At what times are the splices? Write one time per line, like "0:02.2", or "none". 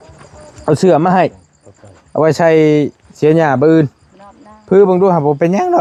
none